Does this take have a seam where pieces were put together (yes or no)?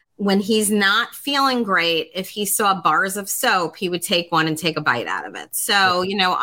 no